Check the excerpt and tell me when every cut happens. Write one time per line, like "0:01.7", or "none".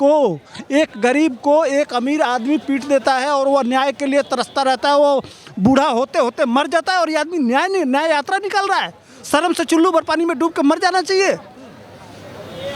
none